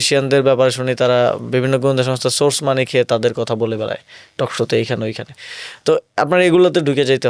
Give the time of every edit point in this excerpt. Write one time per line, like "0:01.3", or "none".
none